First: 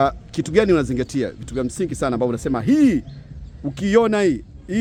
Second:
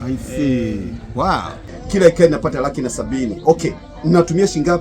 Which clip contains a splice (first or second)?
second